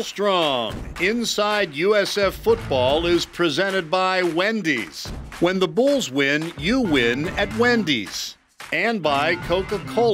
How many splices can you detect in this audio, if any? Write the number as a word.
zero